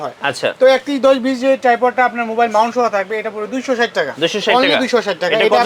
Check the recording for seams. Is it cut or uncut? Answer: uncut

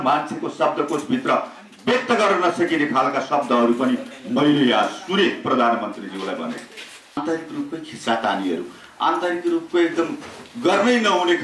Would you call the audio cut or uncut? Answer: cut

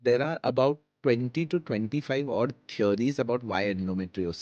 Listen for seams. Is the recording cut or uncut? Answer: uncut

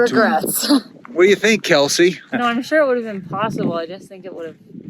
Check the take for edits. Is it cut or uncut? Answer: cut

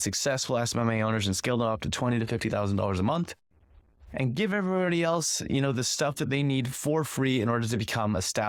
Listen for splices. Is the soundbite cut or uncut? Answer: uncut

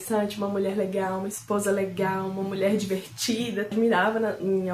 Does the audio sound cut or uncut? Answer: cut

